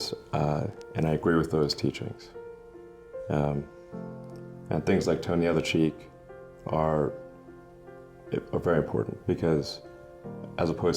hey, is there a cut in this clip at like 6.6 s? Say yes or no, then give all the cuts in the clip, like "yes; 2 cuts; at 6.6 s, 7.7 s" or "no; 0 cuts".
no; 1 cut; at 4.3 s